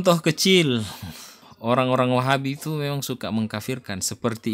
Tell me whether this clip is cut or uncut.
uncut